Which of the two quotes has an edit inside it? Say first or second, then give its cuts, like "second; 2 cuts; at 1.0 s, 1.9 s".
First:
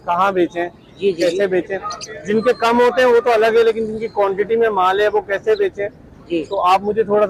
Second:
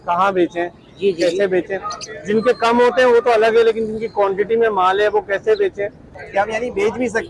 second; 1 cut; at 6.2 s